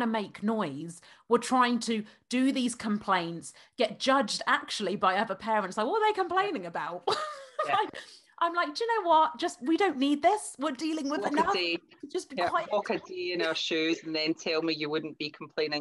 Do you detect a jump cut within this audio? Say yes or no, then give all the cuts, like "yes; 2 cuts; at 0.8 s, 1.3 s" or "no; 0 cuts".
no; 0 cuts